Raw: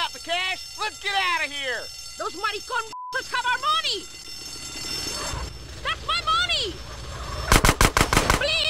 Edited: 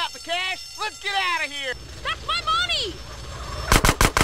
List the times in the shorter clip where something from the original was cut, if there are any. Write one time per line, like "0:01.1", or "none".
0:01.8